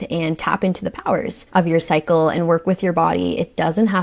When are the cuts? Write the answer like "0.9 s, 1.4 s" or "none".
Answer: 1.4 s